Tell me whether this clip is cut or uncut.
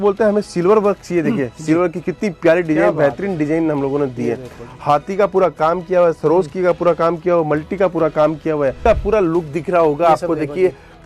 cut